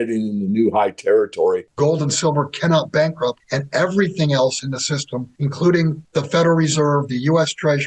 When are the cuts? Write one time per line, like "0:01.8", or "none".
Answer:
0:01.7
0:03.5
0:05.3
0:06.0

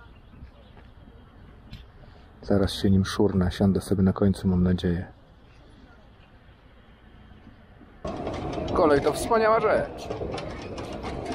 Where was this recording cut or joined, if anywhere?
0:08.0

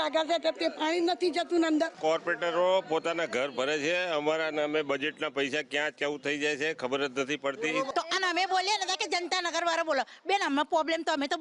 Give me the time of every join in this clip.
0:02.0
0:07.9

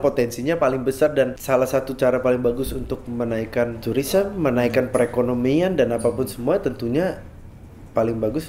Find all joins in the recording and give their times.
0:01.4
0:03.8

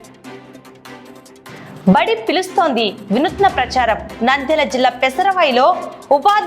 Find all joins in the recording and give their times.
0:01.5

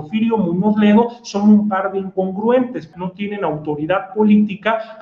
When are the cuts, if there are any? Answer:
0:02.8

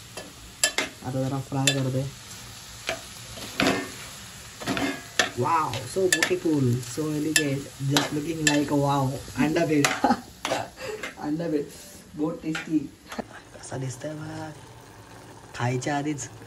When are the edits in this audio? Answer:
0:11.1
0:13.1

